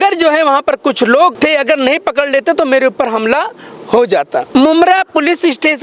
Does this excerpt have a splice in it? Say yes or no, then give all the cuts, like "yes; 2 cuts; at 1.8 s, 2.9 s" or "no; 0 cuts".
yes; 2 cuts; at 1.4 s, 4.5 s